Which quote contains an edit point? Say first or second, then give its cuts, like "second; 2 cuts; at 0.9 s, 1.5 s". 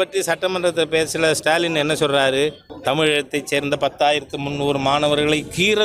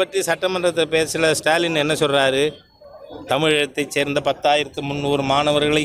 first; 1 cut; at 2.7 s